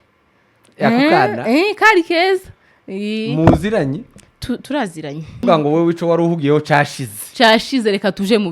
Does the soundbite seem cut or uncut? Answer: cut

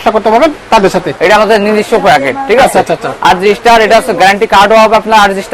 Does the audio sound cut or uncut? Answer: cut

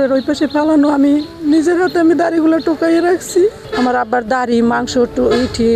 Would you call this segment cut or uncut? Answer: cut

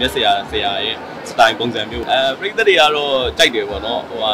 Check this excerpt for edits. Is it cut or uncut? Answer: cut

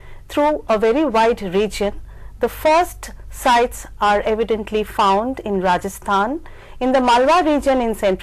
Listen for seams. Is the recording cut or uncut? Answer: uncut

